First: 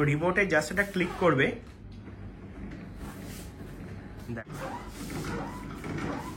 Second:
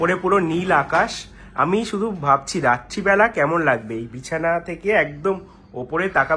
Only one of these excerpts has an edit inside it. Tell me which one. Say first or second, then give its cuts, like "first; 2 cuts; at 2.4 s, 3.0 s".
first; 1 cut; at 4.4 s